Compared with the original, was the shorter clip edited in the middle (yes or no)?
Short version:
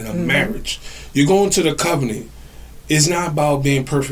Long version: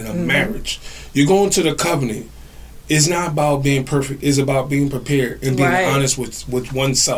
no